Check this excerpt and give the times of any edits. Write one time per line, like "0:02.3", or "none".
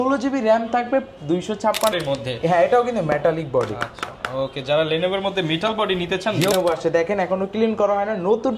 0:01.9
0:06.5